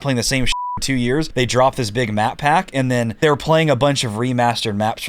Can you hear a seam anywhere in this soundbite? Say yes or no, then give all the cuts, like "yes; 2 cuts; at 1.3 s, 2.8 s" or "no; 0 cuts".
yes; 2 cuts; at 1.3 s, 3.1 s